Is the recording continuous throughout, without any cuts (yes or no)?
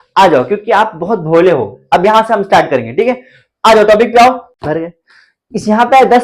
no